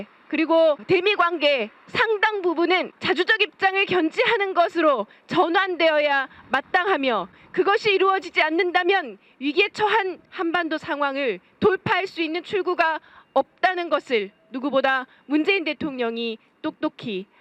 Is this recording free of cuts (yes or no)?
yes